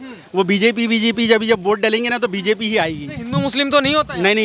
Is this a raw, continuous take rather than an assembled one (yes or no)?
yes